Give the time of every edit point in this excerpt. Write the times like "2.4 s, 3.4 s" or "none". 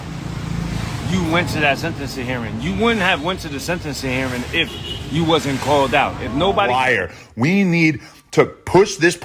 6.8 s